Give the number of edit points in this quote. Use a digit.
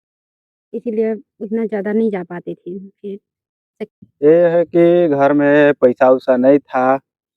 1